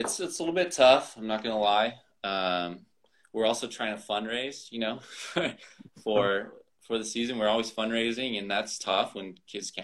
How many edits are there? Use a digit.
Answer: 0